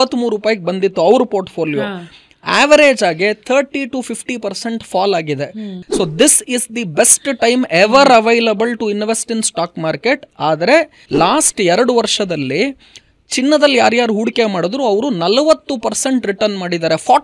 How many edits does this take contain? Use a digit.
2